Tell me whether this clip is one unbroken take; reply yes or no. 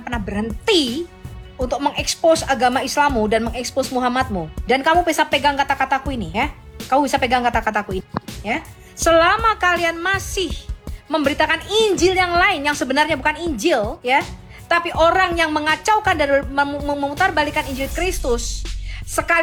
yes